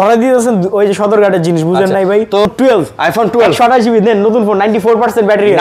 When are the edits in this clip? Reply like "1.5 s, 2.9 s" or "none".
2.5 s